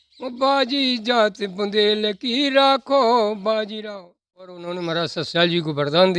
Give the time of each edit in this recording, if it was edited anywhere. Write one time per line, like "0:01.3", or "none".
0:04.7